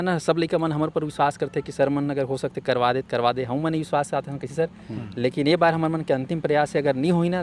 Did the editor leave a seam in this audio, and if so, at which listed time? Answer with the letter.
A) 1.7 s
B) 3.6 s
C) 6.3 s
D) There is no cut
D